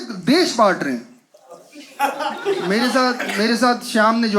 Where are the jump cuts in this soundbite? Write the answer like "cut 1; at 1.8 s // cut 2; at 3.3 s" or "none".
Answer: none

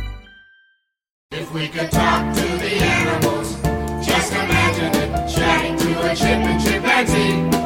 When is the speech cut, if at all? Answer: cut 1; at 1.3 s

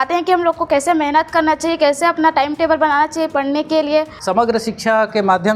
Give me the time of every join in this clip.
cut 1; at 4.1 s

